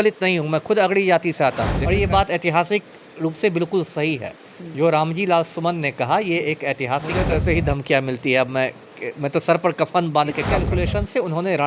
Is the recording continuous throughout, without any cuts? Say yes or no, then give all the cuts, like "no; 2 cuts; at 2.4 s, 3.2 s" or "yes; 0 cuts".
no; 3 cuts; at 1.7 s, 7.2 s, 10.5 s